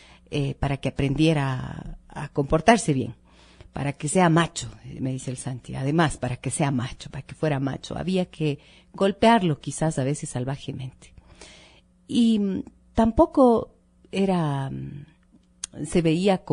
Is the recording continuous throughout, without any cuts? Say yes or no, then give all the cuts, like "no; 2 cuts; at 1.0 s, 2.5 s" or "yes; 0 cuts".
yes; 0 cuts